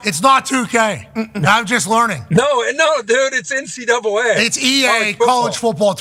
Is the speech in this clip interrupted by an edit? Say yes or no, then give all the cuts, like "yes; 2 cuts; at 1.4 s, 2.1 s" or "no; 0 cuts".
no; 0 cuts